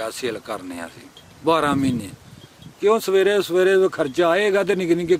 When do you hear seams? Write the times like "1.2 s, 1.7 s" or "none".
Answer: none